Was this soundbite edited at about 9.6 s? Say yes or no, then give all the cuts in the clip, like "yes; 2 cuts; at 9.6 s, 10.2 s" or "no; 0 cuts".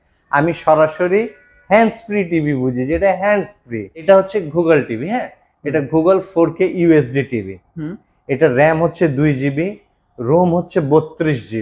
no; 1 cut; at 4.0 s